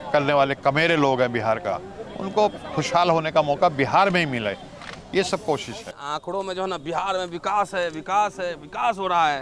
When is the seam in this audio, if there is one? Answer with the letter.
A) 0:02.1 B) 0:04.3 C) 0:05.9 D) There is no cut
C